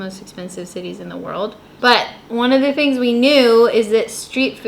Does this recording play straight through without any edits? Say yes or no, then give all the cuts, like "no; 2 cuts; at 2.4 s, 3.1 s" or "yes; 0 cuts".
no; 1 cut; at 1.7 s